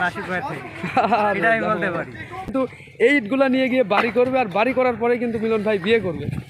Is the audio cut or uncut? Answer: cut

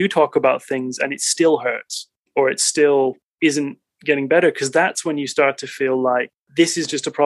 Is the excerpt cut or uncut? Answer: uncut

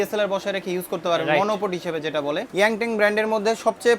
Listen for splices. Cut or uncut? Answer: cut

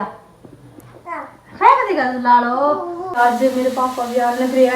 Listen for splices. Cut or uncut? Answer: cut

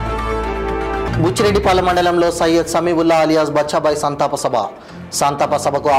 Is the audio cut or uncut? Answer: cut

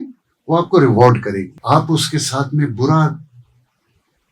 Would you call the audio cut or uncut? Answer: cut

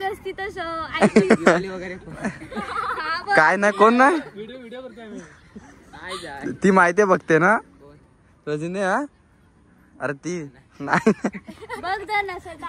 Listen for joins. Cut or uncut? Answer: uncut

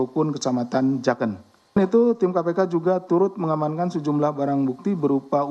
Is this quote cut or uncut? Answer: cut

